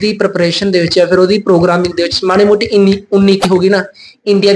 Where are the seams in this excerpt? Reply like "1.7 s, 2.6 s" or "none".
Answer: none